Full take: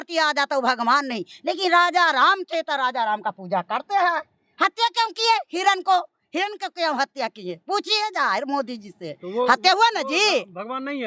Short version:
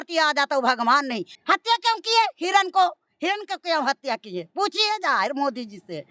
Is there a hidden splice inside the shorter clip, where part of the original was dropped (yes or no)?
yes